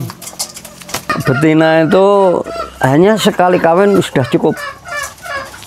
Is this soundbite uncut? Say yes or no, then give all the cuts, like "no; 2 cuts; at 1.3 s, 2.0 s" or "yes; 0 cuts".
no; 1 cut; at 1.1 s